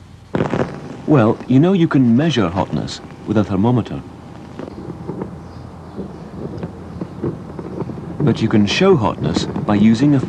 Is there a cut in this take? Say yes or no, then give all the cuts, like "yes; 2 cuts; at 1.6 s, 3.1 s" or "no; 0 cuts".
no; 0 cuts